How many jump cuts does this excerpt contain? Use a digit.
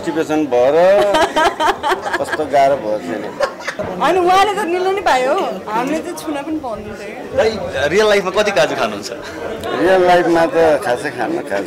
1